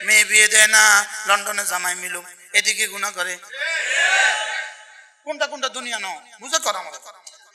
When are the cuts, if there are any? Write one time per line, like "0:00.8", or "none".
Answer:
none